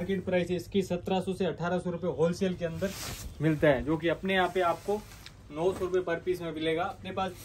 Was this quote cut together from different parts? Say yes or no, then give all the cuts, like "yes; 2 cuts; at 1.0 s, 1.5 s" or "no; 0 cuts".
no; 0 cuts